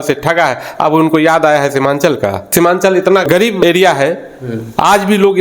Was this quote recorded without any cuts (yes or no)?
no